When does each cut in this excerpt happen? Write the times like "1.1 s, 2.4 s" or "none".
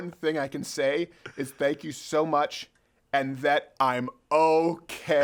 none